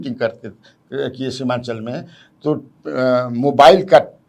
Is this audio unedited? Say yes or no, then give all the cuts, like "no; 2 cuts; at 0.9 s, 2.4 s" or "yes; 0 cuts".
yes; 0 cuts